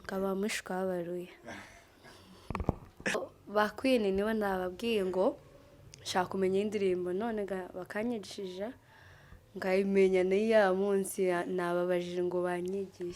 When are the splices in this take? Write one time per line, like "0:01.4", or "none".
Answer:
0:03.2